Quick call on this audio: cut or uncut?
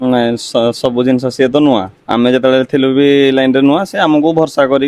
uncut